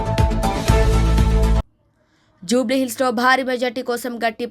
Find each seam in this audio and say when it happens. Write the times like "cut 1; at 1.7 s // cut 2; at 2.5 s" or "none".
cut 1; at 1.6 s